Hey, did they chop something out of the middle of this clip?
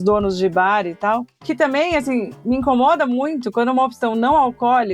yes; 1 cut; at 1.3 s

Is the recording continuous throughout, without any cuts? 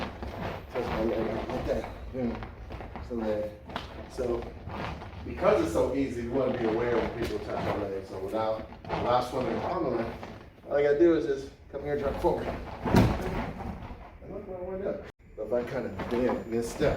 no; 1 cut; at 15.2 s

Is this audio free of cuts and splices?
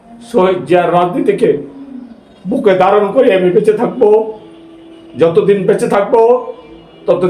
yes; 0 cuts

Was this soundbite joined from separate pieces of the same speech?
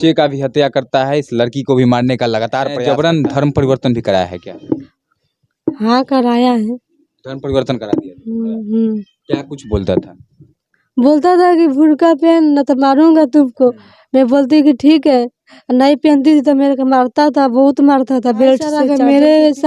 yes; 2 cuts; at 2.8 s, 18.8 s

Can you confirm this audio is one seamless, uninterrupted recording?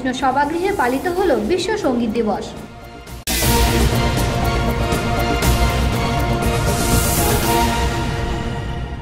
yes; 0 cuts

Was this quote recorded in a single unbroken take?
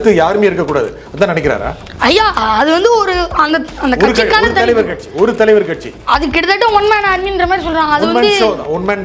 yes; 0 cuts

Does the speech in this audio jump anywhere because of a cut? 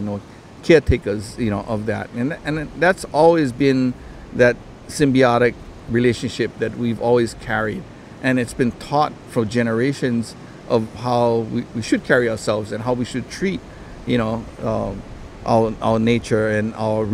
no; 0 cuts

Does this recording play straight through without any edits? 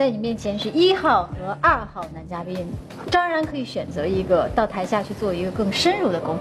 yes; 0 cuts

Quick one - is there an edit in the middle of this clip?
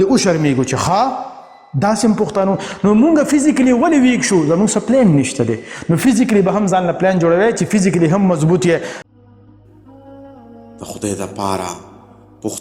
yes; 1 cut; at 9.0 s

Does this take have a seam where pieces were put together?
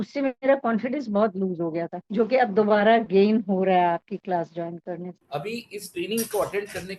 yes; 1 cut; at 5.2 s

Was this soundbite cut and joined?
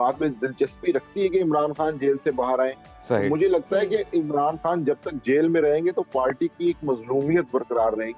no; 0 cuts

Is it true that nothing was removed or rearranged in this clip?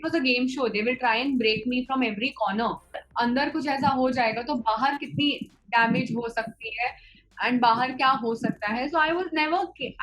no; 1 cut; at 3.0 s

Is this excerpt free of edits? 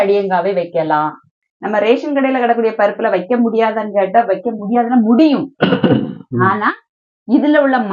no; 1 cut; at 1.4 s

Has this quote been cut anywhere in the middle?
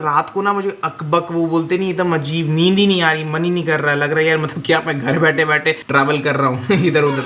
yes; 1 cut; at 5.8 s

